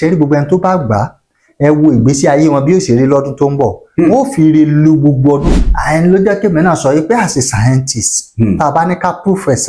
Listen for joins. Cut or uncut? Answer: cut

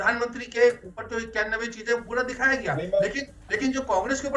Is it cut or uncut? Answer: uncut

